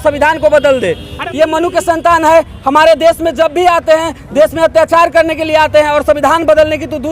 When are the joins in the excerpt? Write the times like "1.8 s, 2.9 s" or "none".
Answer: 1.2 s